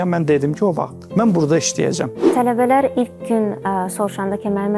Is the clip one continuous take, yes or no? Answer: no